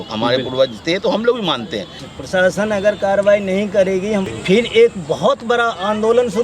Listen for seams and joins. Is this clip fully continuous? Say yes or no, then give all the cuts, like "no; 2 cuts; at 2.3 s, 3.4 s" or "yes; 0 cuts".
no; 2 cuts; at 2.1 s, 4.3 s